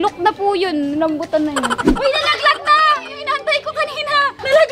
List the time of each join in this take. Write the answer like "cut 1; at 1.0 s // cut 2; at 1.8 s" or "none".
cut 1; at 1.9 s